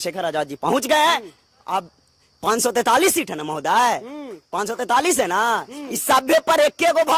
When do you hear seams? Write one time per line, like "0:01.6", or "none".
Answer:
none